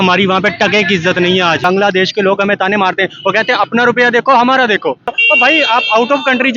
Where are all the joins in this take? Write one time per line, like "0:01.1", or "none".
0:01.6
0:05.1